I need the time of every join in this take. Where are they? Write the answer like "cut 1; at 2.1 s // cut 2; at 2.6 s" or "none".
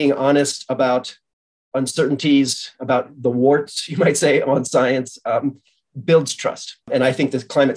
cut 1; at 6.8 s